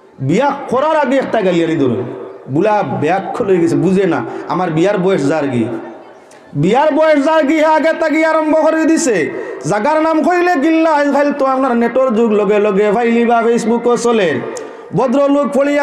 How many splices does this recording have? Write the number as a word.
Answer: zero